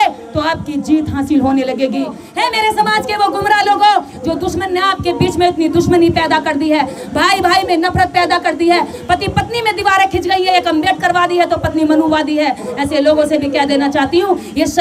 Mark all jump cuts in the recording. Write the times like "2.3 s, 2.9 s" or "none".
2.2 s

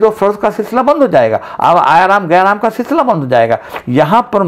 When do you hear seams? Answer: none

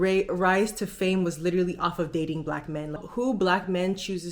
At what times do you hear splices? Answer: 3.0 s

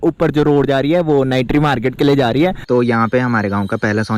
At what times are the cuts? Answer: 2.6 s

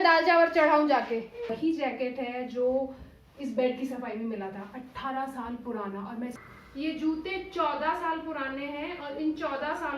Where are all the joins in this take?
1.5 s, 6.4 s

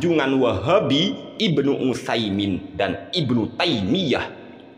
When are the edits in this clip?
1.3 s

